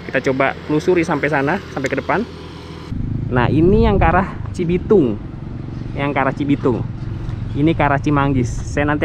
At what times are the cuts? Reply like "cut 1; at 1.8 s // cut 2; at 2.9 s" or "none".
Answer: cut 1; at 2.9 s